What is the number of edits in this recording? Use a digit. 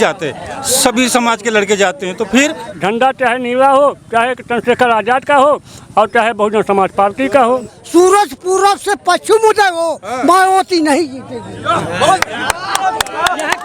2